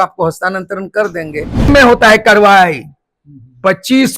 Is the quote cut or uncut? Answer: cut